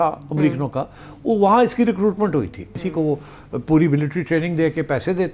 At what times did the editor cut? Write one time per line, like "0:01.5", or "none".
0:02.8